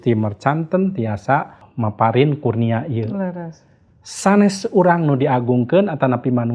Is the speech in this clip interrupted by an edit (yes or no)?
yes